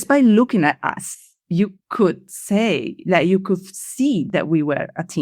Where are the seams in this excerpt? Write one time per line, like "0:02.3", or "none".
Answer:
none